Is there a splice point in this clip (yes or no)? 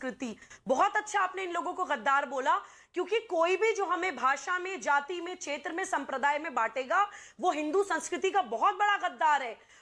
no